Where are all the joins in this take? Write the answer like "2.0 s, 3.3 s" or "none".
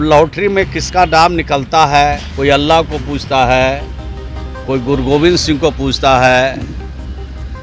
2.3 s